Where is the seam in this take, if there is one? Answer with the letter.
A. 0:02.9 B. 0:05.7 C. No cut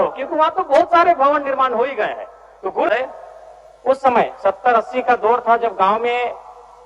A